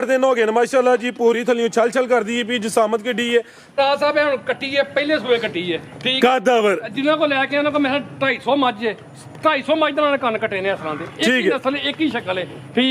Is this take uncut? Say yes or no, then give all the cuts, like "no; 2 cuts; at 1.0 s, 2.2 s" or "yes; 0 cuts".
no; 1 cut; at 3.7 s